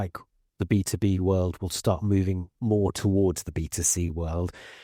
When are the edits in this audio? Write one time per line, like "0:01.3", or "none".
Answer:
none